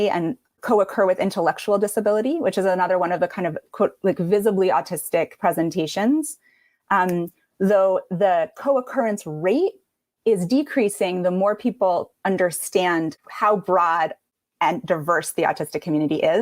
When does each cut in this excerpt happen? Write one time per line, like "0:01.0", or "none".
none